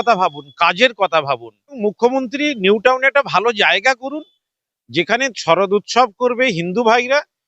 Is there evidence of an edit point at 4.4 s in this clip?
no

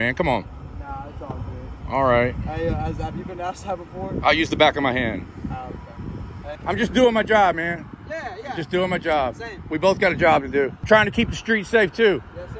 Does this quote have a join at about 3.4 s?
no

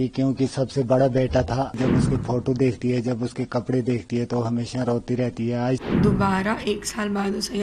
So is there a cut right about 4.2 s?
no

